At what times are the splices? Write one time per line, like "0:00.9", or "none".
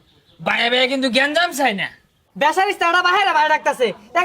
0:02.2